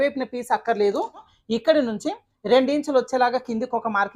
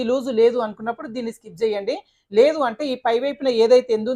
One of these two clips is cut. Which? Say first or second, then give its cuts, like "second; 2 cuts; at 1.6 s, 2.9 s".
first; 1 cut; at 1.3 s